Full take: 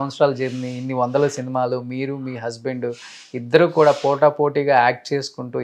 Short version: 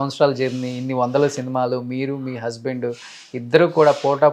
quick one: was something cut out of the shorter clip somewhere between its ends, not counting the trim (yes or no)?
no